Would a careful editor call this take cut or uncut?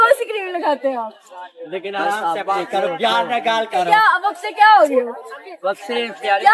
uncut